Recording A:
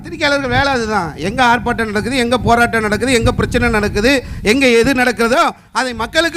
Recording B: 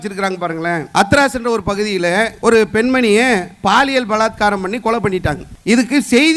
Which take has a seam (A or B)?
B